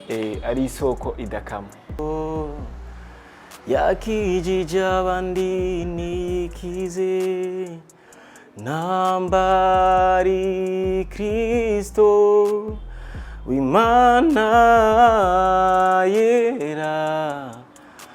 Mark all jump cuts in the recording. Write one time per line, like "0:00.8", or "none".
0:02.0